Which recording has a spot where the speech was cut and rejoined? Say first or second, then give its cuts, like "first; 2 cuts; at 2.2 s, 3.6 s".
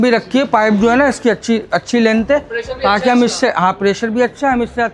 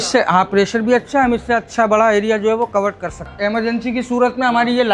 second; 1 cut; at 3.3 s